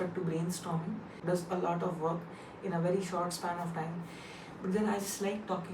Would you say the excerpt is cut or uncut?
cut